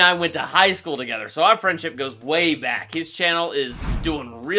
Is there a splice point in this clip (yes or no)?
no